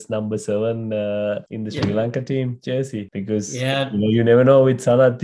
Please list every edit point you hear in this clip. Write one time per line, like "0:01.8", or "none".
0:01.5
0:03.1